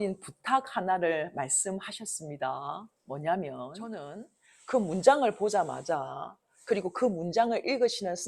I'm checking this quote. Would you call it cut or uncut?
cut